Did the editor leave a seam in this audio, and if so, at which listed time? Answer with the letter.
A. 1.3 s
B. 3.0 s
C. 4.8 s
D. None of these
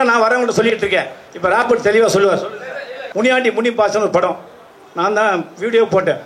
B